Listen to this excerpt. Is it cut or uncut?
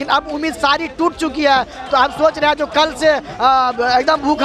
uncut